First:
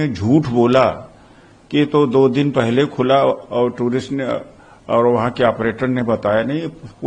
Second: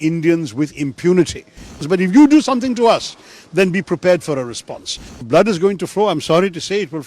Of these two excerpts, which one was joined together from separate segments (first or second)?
second